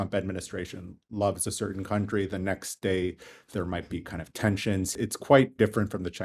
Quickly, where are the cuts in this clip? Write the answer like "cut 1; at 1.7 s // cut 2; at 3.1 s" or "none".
cut 1; at 4.9 s